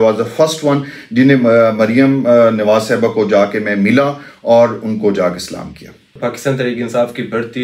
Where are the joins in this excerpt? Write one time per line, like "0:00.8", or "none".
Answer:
none